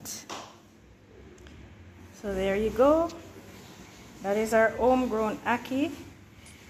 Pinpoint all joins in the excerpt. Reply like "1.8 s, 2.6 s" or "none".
1.0 s